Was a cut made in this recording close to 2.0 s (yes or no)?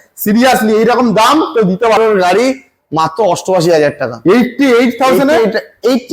yes